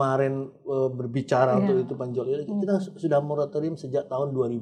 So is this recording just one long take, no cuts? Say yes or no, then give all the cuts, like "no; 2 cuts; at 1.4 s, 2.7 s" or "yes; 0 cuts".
yes; 0 cuts